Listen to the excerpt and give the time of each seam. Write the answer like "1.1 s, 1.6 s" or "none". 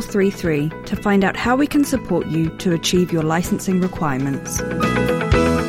4.6 s